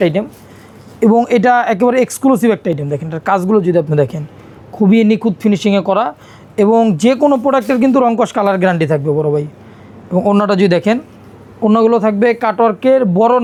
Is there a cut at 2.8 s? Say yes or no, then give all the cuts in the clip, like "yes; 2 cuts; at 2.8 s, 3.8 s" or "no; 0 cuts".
no; 0 cuts